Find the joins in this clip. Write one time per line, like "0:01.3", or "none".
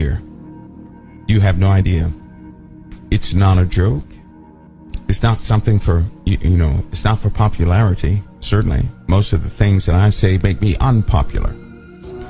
0:10.5

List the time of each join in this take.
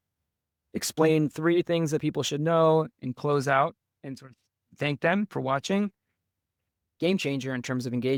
none

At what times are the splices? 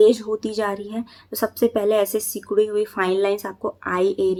none

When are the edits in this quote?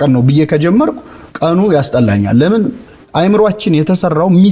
none

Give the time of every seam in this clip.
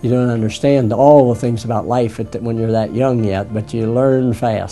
none

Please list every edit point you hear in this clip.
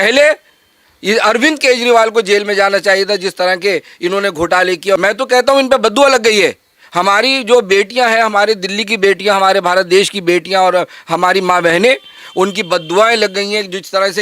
0:05.0

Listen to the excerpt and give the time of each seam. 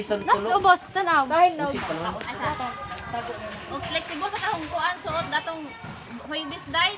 none

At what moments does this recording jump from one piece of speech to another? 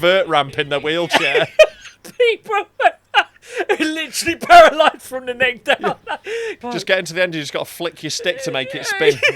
0:06.6

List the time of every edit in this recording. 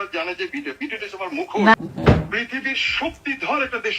0:01.7

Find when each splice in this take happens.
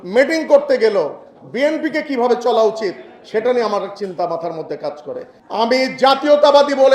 0:05.4

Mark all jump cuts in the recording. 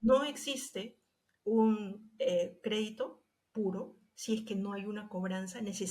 none

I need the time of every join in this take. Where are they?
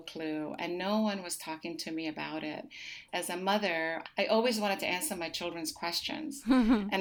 0:03.0
0:04.0

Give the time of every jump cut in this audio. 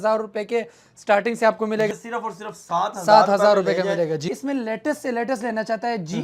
0:01.9
0:04.2

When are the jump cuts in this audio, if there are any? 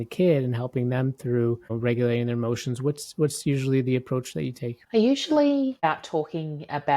0:01.7
0:04.7
0:05.9

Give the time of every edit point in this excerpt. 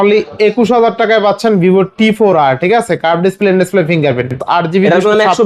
0:04.4

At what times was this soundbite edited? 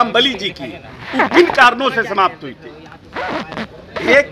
none

